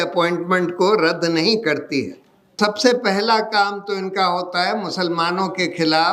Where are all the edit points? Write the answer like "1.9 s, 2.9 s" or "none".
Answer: 2.6 s